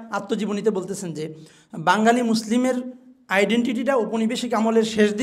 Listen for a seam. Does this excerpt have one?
no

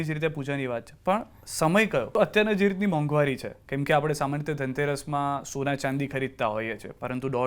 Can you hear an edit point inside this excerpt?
yes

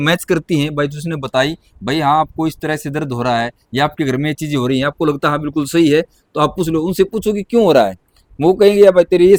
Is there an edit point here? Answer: no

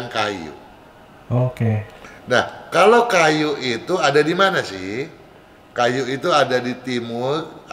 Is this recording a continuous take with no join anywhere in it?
yes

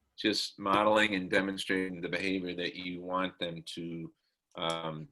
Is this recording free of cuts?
yes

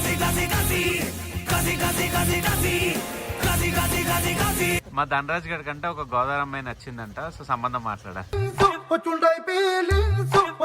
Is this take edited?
yes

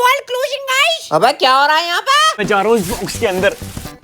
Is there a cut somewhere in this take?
yes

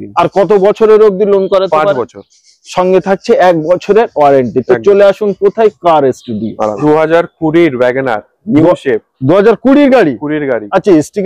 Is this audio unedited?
yes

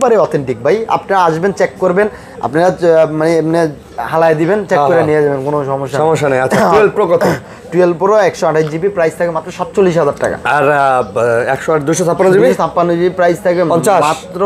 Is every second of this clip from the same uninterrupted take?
yes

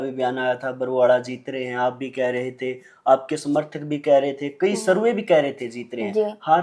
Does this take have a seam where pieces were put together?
no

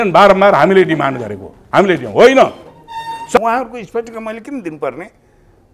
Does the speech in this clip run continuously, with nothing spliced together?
no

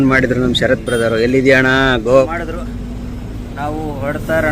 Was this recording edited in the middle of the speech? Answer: yes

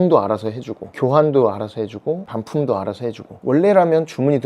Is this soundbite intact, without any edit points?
no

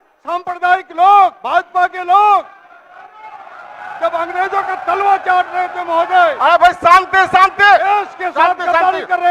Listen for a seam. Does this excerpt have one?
no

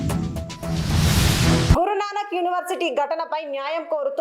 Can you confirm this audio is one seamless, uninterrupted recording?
no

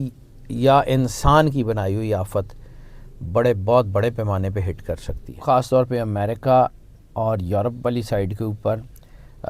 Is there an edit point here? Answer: yes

